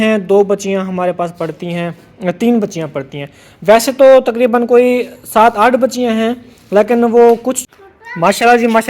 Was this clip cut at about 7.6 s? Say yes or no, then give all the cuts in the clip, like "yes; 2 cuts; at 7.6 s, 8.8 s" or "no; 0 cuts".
yes; 1 cut; at 7.6 s